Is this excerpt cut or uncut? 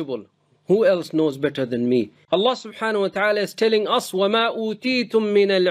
cut